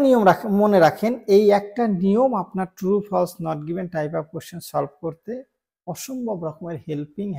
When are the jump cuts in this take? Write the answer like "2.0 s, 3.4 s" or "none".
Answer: none

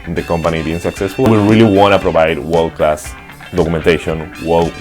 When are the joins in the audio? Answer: 1.3 s

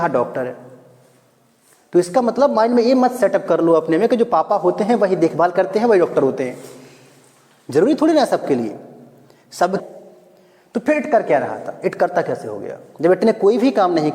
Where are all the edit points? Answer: 9.8 s

